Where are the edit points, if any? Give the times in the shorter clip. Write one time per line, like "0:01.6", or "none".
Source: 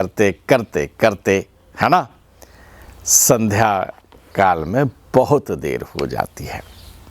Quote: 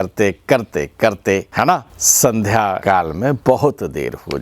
0:01.6
0:03.2